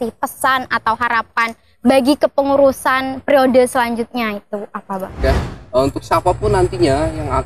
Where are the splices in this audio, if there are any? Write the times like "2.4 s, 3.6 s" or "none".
5.4 s